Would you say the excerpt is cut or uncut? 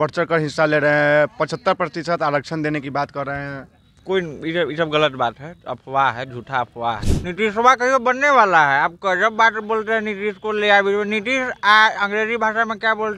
cut